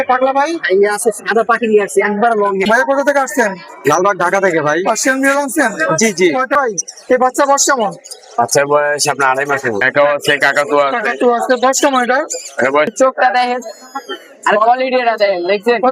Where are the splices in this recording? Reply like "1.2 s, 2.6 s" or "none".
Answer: 2.6 s, 6.5 s, 9.9 s, 12.9 s